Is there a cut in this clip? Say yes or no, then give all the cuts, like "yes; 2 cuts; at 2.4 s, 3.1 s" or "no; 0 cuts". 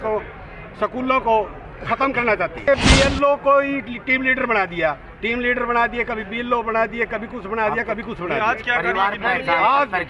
yes; 1 cut; at 2.7 s